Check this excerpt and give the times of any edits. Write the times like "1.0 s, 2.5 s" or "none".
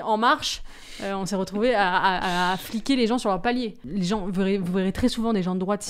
3.8 s